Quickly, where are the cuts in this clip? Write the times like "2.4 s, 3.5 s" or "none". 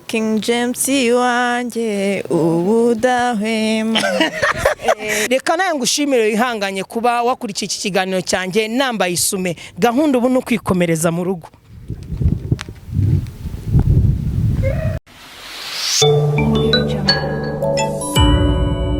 5.1 s, 15.0 s

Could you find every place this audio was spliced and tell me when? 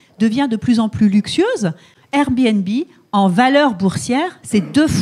1.9 s

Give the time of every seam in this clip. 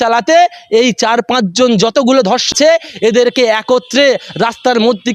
2.5 s

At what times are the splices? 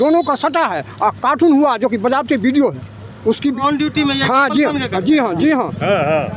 3.6 s

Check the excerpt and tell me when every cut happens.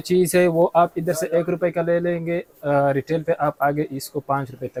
none

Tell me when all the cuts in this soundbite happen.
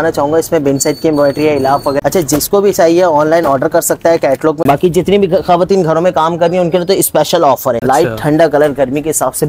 2.0 s, 4.6 s, 7.8 s

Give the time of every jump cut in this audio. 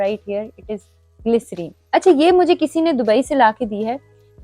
1.7 s

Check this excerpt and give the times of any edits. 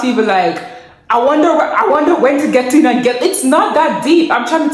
none

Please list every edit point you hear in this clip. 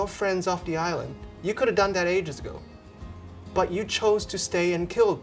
none

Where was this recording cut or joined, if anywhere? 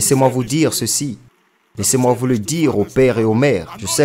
none

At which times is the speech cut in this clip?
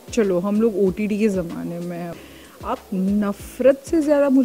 2.1 s

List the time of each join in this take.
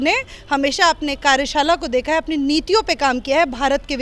none

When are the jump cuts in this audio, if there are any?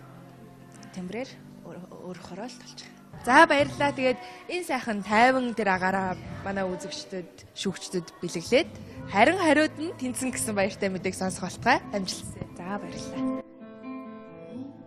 none

